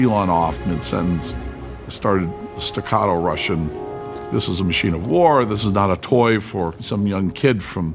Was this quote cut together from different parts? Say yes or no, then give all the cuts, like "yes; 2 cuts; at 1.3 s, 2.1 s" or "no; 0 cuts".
no; 0 cuts